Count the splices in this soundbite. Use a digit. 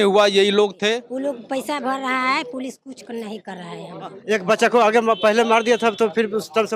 2